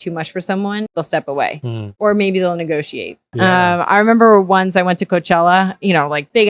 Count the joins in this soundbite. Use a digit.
3